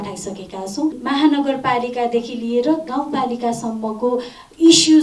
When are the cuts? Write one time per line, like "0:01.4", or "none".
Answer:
0:01.0